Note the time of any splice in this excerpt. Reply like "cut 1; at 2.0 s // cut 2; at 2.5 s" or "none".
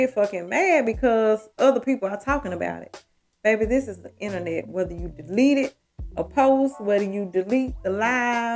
none